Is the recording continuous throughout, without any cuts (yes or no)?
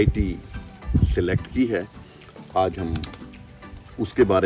yes